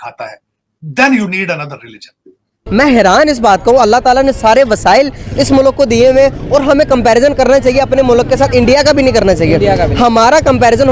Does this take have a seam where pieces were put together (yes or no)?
yes